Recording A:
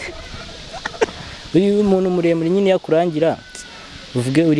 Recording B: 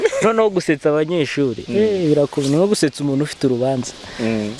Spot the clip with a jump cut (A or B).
A